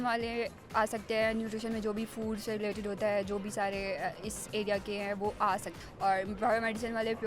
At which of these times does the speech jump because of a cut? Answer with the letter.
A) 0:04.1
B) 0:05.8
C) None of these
B